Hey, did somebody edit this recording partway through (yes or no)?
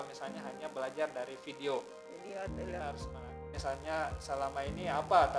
yes